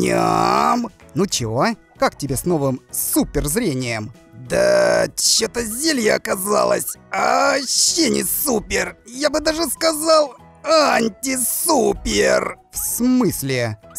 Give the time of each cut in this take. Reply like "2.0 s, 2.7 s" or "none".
1.0 s